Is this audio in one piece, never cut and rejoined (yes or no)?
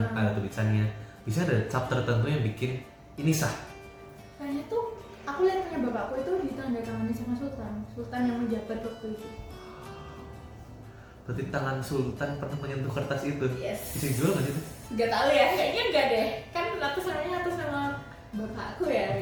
yes